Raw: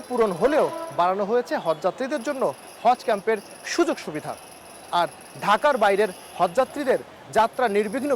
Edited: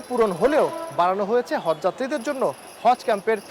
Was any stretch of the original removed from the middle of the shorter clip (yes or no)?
no